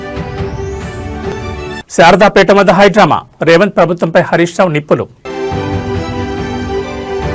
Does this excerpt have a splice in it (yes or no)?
yes